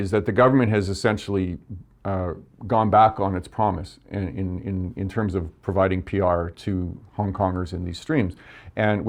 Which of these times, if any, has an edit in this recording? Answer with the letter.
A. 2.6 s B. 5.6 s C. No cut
C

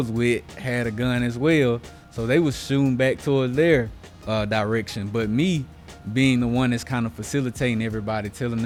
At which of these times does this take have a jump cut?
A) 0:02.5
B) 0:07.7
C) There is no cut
C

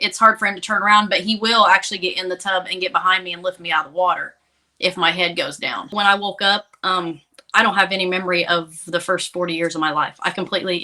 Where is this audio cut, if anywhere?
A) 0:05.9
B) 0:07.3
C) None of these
A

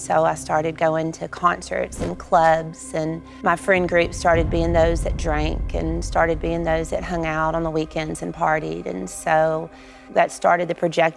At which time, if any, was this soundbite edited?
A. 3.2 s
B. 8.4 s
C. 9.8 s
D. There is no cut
D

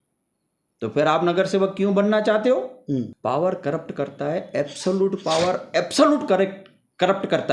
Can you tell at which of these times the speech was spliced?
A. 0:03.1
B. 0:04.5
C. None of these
A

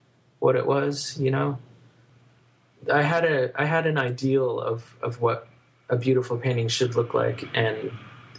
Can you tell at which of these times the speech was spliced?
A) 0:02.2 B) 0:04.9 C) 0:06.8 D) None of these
A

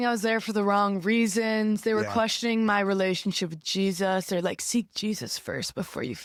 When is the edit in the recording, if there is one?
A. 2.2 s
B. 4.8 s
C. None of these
C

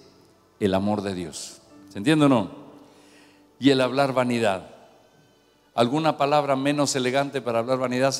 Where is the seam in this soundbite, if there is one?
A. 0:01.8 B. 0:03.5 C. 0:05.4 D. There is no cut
D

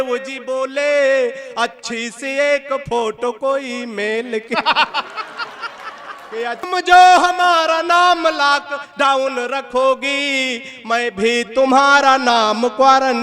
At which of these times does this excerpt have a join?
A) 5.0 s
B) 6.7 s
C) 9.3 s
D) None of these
B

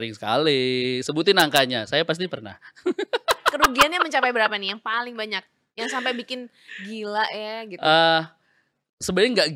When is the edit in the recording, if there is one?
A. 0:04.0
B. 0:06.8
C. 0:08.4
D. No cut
D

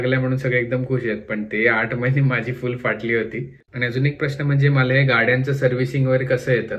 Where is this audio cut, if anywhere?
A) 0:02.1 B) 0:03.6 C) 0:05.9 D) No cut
B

